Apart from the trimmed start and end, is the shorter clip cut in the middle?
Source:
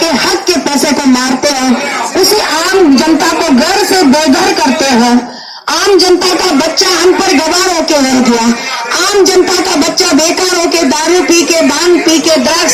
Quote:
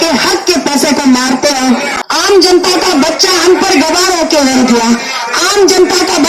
yes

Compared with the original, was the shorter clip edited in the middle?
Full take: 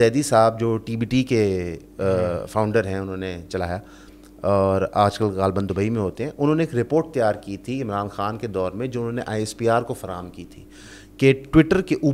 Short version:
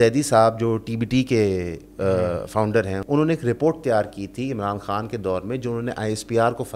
yes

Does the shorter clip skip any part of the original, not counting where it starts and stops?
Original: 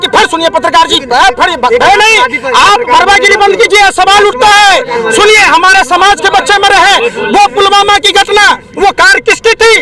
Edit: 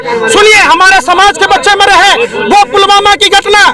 no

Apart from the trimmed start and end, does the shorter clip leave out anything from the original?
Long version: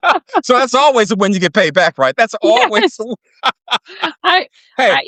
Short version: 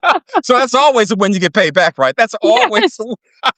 no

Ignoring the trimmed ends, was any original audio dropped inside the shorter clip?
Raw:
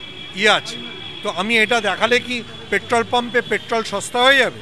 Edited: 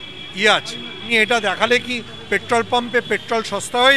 yes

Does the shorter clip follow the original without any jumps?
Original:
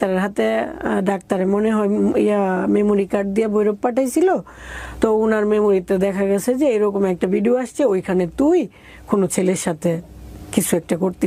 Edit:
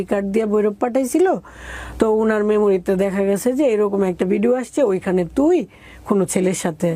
yes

